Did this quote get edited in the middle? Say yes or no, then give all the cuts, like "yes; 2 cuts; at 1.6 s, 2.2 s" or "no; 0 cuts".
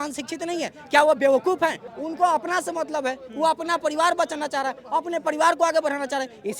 yes; 1 cut; at 1.9 s